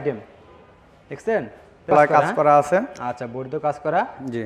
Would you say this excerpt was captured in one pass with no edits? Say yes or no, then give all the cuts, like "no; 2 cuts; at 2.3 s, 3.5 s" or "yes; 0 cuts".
no; 1 cut; at 1.9 s